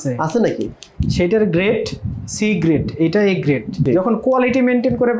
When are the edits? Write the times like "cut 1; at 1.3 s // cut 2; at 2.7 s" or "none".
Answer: cut 1; at 3.8 s